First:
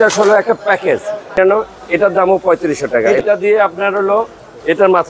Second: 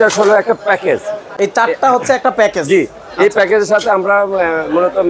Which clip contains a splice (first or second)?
first